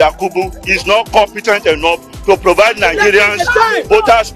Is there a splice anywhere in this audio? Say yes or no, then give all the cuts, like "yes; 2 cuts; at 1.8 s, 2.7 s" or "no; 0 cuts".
no; 0 cuts